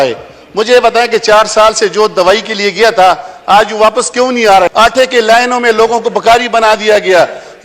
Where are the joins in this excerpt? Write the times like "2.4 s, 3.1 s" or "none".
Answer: 4.7 s